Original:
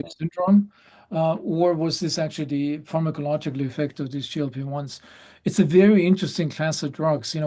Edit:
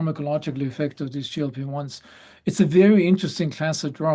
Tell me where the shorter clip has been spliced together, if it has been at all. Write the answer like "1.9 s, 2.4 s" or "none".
none